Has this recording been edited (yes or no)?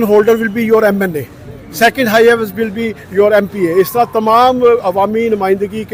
no